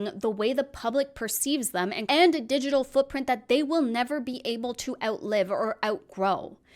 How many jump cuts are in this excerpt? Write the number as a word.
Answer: one